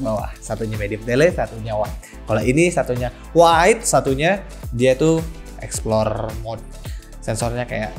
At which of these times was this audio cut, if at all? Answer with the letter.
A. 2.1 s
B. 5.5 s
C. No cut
C